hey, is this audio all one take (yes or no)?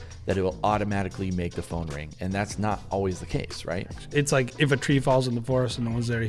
no